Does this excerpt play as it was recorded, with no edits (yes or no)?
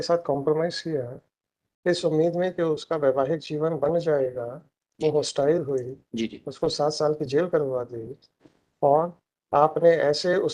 yes